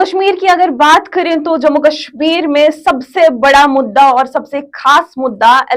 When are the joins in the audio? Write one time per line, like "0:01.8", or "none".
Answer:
none